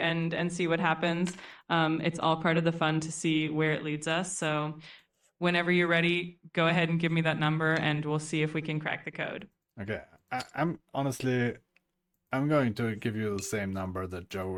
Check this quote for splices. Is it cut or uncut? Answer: uncut